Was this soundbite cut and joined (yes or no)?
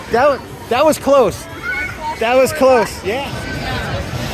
yes